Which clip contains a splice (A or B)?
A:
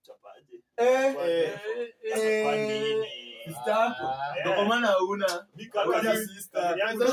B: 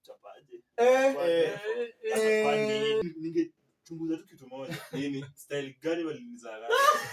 B